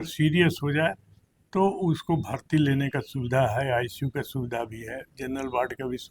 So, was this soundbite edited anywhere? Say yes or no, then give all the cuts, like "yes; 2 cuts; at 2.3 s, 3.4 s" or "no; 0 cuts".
no; 0 cuts